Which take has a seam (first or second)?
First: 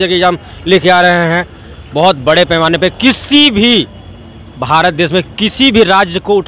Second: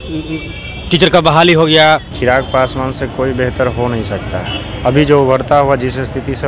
second